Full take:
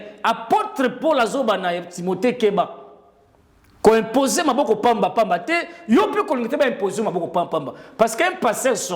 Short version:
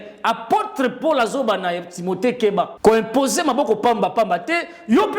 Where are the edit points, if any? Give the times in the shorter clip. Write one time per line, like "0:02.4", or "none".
0:02.7